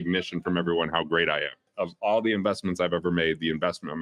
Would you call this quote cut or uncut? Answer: cut